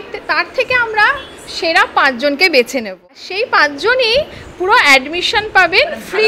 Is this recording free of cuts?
no; 1 cut; at 3.0 s

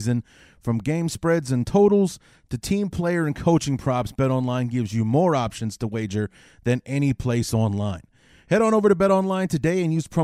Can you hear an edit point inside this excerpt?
no; 0 cuts

